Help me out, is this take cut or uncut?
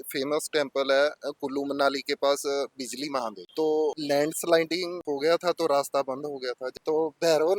cut